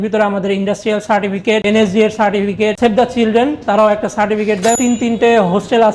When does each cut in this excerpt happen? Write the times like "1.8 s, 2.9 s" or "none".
2.8 s, 4.8 s